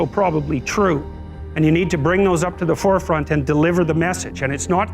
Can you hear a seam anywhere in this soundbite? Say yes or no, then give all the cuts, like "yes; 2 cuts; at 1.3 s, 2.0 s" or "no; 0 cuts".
no; 0 cuts